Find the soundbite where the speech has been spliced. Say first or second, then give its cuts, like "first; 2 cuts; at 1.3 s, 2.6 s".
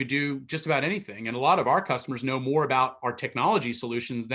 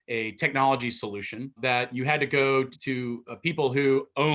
second; 2 cuts; at 1.6 s, 2.7 s